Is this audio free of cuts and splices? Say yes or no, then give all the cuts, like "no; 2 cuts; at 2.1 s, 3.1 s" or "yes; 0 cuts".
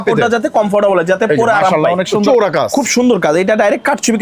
no; 1 cut; at 2.2 s